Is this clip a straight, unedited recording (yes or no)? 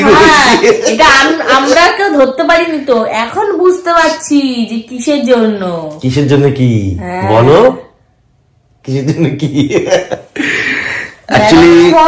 yes